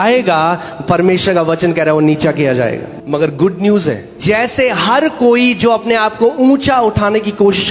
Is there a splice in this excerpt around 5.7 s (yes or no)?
no